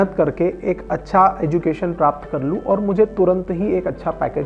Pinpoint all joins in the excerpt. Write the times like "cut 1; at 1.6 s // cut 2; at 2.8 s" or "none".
none

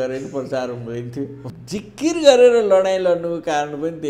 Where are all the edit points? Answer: cut 1; at 1.4 s

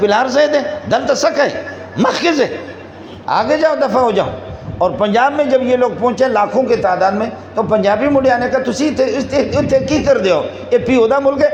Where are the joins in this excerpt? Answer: none

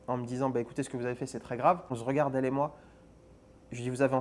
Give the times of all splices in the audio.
cut 1; at 1.9 s

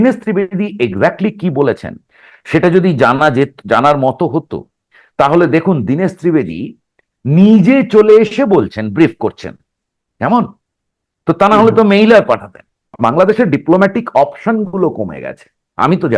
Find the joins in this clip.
cut 1; at 12.9 s

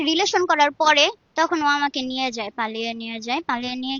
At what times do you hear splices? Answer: cut 1; at 1.2 s

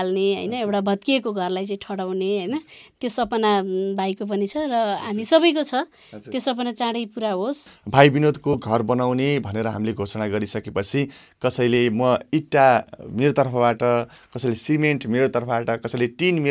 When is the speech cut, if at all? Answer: cut 1; at 7.7 s

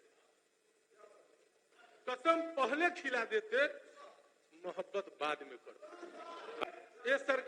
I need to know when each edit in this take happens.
cut 1; at 6.6 s

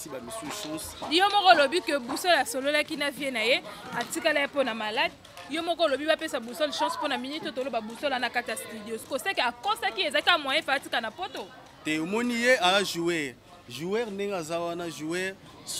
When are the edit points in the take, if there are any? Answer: none

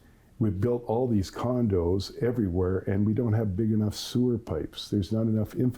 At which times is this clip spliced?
none

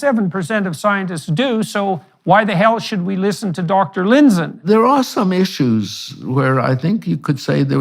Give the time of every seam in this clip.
cut 1; at 4.6 s

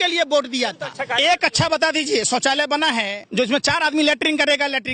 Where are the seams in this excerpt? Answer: cut 1; at 1.0 s // cut 2; at 3.2 s

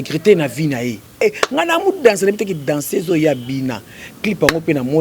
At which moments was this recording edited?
cut 1; at 1.2 s

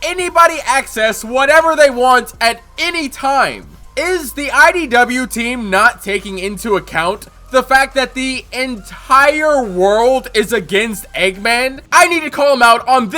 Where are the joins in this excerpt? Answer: cut 1; at 11.8 s

